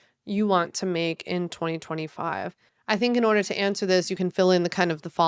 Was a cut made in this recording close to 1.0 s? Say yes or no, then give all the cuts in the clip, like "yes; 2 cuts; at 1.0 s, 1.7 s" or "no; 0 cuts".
no; 2 cuts; at 2.7 s, 4.1 s